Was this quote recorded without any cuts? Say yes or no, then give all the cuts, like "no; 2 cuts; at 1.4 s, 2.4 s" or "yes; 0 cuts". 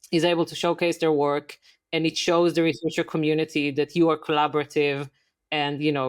yes; 0 cuts